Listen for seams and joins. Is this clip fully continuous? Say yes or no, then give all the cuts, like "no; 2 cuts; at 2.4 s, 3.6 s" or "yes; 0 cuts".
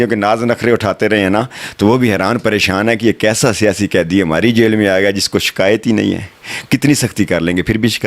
yes; 0 cuts